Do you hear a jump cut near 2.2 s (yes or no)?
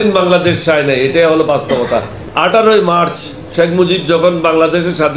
yes